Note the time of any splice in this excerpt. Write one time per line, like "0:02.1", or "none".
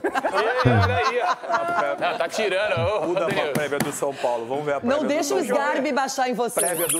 none